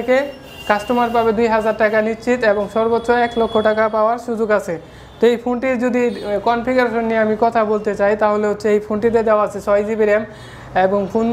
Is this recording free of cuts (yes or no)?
yes